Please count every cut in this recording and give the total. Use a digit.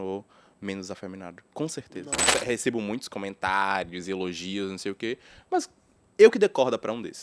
1